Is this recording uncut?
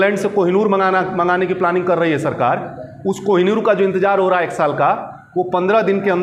yes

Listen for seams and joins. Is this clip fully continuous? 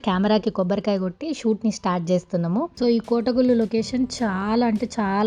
no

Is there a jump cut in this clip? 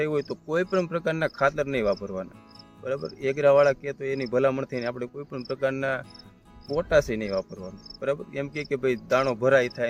no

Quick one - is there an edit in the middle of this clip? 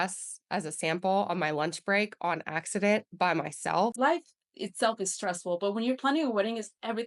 yes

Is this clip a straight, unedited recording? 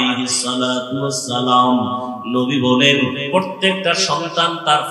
yes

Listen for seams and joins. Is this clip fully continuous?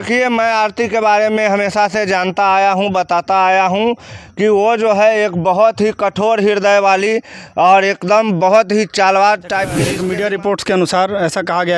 no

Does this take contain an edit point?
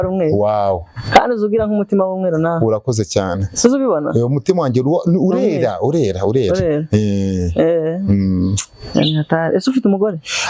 no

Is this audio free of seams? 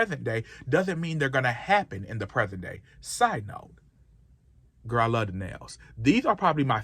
yes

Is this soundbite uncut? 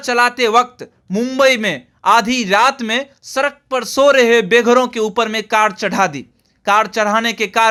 yes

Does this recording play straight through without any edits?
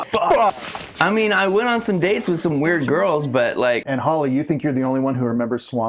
no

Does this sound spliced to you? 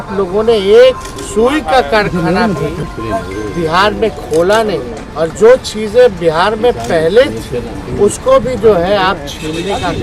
yes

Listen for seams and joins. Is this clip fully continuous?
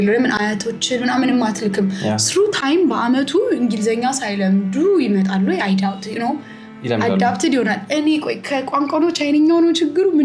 yes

